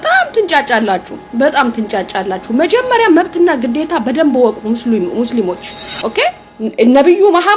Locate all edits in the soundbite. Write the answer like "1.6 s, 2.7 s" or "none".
6.5 s